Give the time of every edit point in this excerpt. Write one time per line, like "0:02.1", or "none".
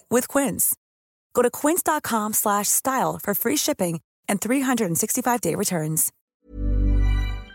0:06.1